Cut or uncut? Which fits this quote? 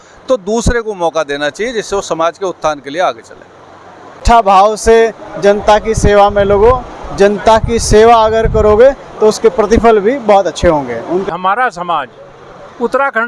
cut